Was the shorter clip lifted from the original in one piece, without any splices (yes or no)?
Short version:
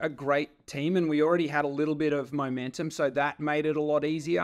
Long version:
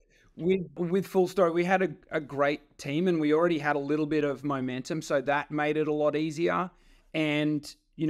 yes